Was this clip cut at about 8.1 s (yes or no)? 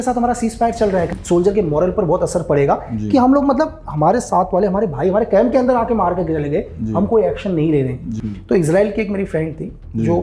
yes